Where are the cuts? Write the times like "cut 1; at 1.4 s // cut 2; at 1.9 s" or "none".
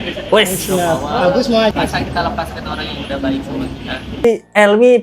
cut 1; at 1.7 s // cut 2; at 4.2 s

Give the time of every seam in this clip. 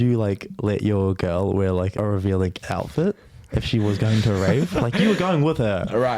cut 1; at 1.9 s

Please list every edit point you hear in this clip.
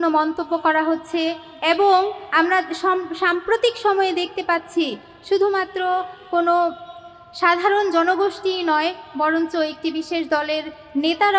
none

